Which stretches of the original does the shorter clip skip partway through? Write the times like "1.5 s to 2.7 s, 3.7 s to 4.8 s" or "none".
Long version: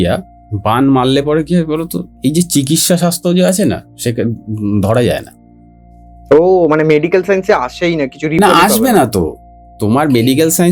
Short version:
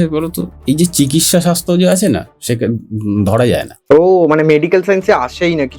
5.3 s to 6.1 s

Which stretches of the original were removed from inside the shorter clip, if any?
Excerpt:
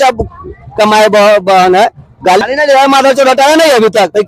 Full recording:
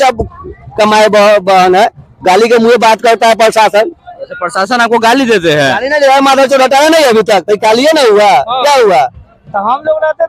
2.4 s to 5.7 s

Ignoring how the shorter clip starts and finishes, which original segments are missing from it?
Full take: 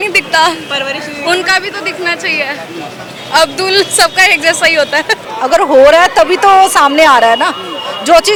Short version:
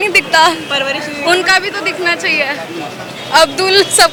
none

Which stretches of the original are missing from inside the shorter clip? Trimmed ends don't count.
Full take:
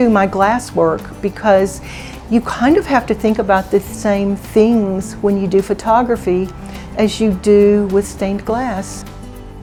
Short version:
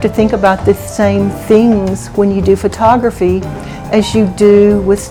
none

